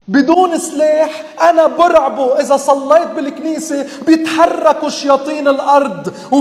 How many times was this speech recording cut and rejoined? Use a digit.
0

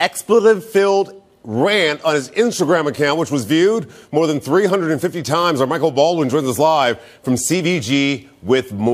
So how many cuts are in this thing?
1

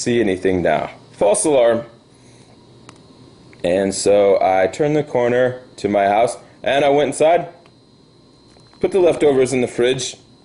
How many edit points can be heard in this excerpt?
1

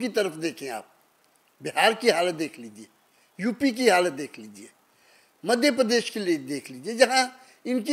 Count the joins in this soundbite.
0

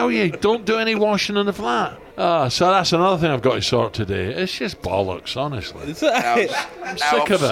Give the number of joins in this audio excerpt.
1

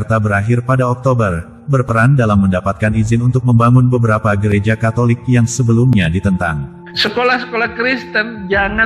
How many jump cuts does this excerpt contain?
1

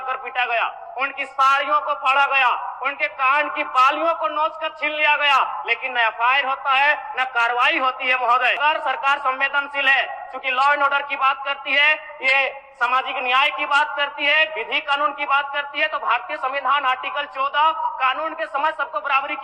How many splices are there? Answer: 1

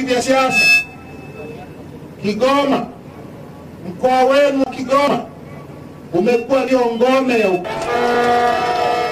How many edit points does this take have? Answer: 1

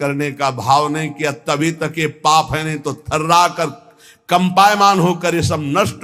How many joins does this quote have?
0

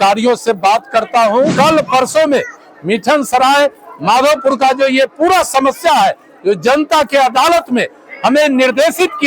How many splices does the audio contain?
1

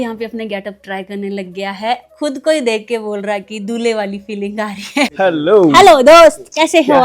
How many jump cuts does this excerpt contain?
2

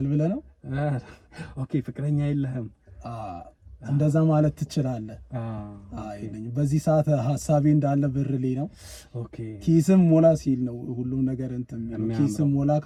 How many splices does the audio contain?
0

